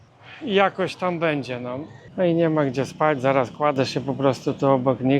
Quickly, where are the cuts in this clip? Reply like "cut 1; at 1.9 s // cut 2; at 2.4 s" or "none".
cut 1; at 2.1 s